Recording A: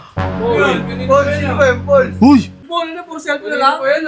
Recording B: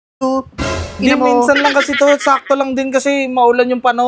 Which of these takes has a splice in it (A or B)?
A